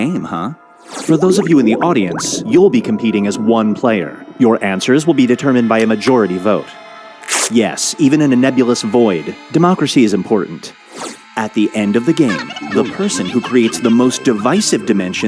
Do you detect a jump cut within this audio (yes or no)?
no